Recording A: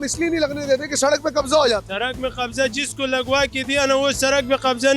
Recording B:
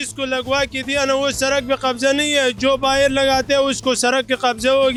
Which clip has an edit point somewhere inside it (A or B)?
A